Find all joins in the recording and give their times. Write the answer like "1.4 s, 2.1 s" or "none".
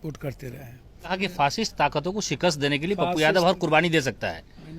1.2 s